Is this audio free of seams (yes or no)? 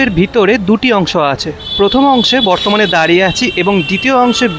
yes